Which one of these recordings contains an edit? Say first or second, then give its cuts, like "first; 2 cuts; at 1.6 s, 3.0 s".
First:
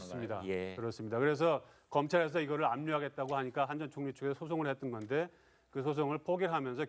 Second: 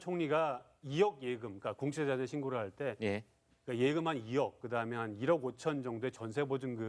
first; 1 cut; at 5.0 s